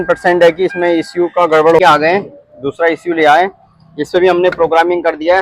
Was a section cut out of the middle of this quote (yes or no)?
yes